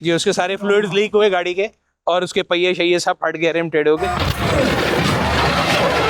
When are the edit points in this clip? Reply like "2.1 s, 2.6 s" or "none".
4.0 s